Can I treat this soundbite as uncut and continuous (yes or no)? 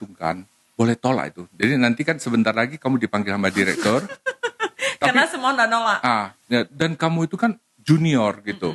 yes